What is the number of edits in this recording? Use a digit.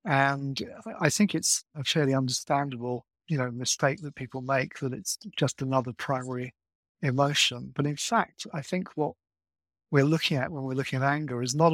1